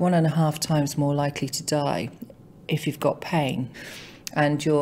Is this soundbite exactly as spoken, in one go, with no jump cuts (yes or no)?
no